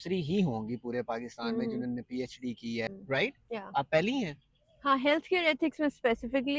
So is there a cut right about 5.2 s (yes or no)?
no